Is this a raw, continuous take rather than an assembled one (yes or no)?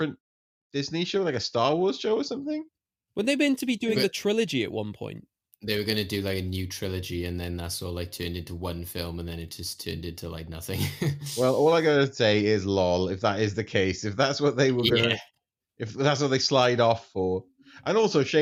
yes